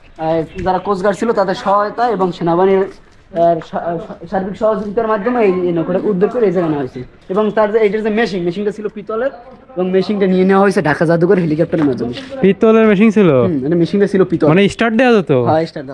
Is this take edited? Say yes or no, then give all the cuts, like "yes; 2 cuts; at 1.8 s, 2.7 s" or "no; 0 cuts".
no; 0 cuts